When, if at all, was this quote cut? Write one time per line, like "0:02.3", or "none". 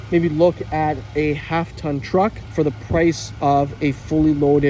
0:02.9